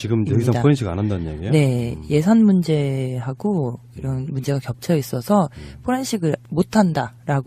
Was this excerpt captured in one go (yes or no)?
yes